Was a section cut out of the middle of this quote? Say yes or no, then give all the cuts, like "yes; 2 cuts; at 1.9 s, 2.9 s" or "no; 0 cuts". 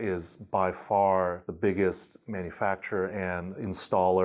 yes; 1 cut; at 1.5 s